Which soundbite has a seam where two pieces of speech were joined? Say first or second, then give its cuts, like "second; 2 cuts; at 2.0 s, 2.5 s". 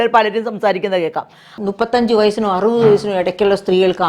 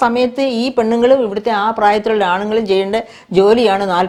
first; 1 cut; at 1.6 s